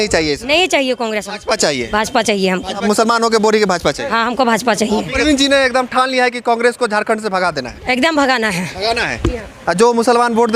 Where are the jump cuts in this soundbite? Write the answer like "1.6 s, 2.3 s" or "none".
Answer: 2.8 s, 5.1 s